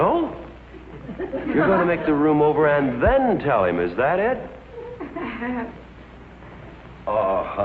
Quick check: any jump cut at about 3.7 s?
no; 1 cut; at 5.4 s

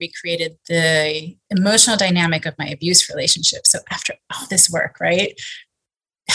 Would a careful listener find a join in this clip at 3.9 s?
no; 1 cut; at 1.3 s

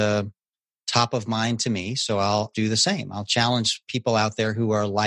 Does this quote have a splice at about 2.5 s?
yes; 1 cut; at 2.5 s

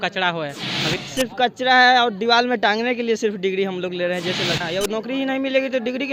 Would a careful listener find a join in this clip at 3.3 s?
no; 2 cuts; at 1.0 s, 4.6 s

